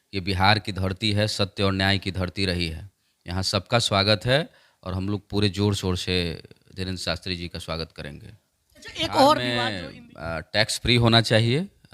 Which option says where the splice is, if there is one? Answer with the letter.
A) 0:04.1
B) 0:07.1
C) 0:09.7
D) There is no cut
C